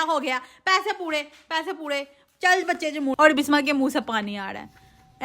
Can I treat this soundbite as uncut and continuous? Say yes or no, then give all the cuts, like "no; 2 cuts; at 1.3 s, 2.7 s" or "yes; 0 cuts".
no; 1 cut; at 3.1 s